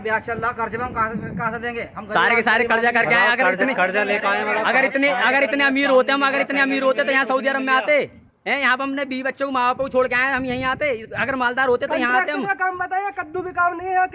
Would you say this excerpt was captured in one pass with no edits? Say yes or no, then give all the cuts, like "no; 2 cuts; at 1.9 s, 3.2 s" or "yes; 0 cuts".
yes; 0 cuts